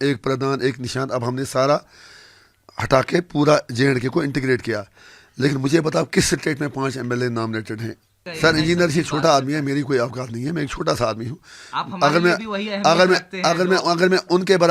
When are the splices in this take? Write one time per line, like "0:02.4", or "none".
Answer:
0:08.2

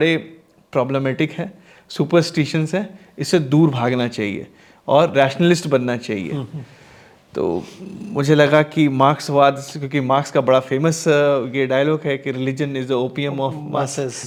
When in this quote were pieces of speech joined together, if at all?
none

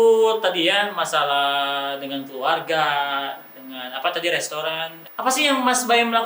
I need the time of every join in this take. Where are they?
0:05.0

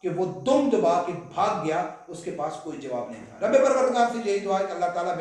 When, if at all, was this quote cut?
none

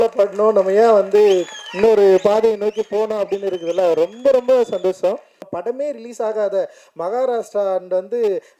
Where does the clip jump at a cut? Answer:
0:05.4

